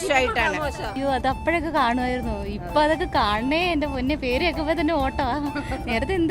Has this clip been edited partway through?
yes; 1 cut; at 0.9 s

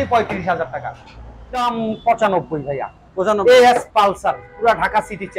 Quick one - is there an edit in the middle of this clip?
yes; 1 cut; at 1.6 s

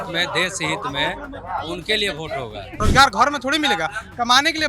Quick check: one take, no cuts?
no; 1 cut; at 2.8 s

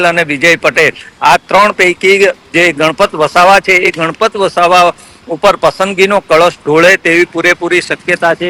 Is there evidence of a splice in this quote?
no; 0 cuts

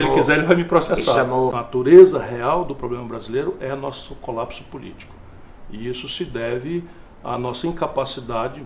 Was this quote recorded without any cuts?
no; 1 cut; at 1.6 s

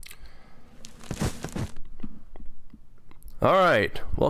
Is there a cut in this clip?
no; 0 cuts

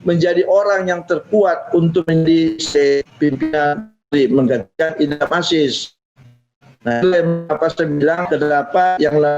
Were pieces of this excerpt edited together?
yes; 1 cut; at 8.2 s

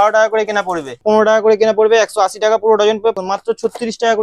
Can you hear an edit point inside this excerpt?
yes; 2 cuts; at 1.0 s, 3.2 s

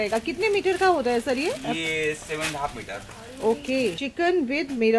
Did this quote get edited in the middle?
yes; 1 cut; at 4.0 s

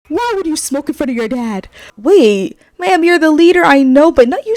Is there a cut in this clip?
yes; 1 cut; at 1.9 s

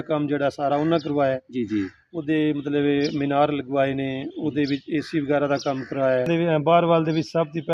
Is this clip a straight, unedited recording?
no; 1 cut; at 6.3 s

